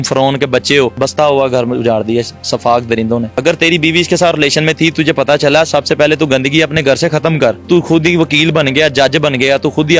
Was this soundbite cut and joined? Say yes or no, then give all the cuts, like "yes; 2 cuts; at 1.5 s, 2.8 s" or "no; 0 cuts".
yes; 3 cuts; at 0.9 s, 3.3 s, 7.6 s